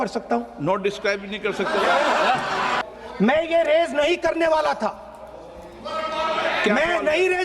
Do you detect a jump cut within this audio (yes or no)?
yes